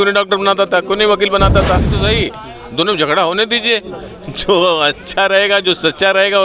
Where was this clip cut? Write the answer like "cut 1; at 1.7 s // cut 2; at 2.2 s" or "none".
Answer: cut 1; at 2.0 s